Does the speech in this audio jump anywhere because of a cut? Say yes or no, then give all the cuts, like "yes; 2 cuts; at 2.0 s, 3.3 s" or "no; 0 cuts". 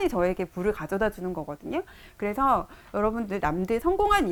no; 0 cuts